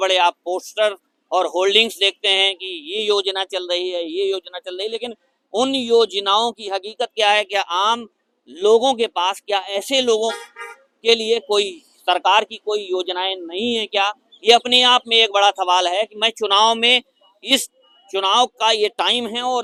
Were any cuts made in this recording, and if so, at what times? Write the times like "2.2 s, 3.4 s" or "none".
none